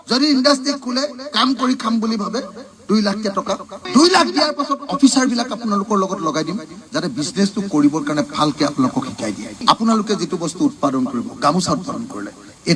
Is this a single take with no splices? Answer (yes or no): yes